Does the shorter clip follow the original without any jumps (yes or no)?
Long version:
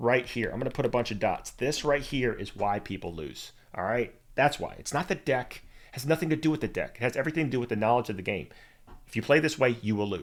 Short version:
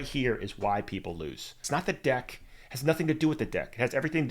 no